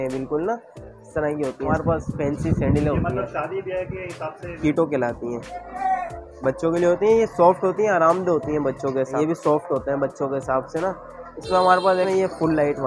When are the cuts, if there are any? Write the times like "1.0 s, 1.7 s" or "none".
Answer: 1.7 s, 4.6 s, 9.1 s, 12.1 s